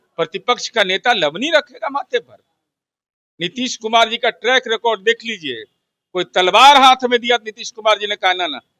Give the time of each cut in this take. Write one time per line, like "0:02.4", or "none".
none